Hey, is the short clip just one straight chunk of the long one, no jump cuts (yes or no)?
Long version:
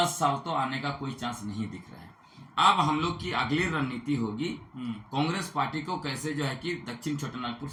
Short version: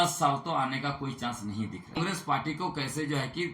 no